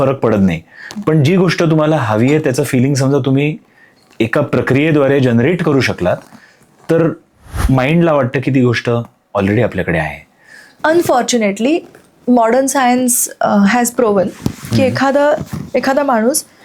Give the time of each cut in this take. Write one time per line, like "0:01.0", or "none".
0:10.6